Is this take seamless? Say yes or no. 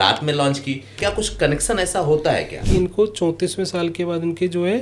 no